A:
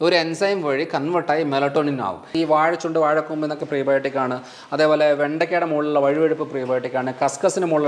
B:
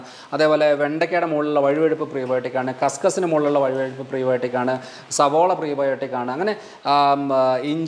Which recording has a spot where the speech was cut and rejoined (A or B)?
A